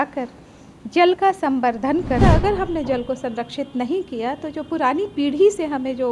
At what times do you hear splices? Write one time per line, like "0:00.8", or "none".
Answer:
0:02.2

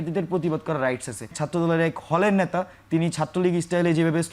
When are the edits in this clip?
0:01.4

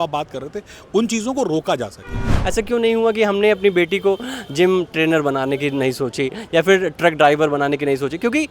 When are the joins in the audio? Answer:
0:02.3

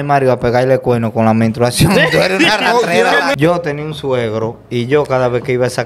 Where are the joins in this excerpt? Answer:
0:03.3

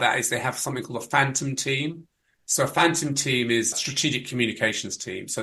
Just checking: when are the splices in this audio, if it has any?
0:03.7

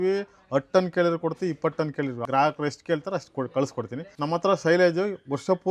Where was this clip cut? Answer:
0:02.2
0:04.0

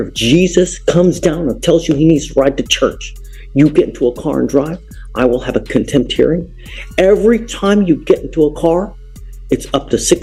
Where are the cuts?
none

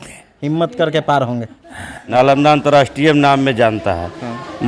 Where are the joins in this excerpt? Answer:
0:02.0

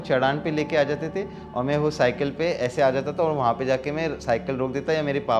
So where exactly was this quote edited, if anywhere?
none

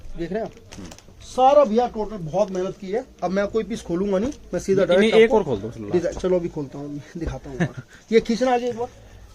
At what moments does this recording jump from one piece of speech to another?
none

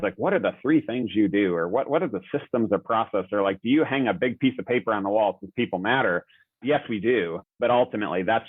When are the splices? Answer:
0:06.6

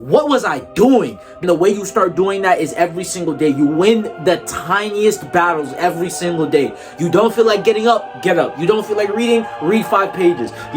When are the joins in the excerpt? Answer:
0:01.3

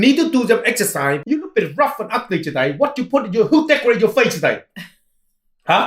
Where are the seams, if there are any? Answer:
0:01.2

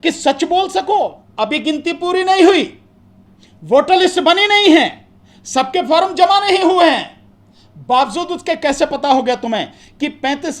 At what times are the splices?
0:01.2

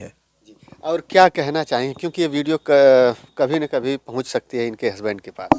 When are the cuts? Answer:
none

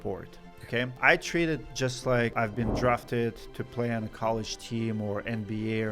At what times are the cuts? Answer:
0:00.9
0:02.3

